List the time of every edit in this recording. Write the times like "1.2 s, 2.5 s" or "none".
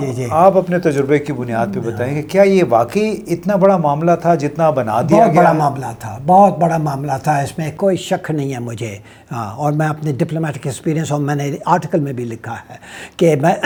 none